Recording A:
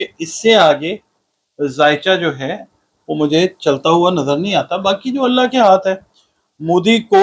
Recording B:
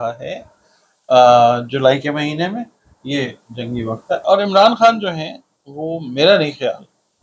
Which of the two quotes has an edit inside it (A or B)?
B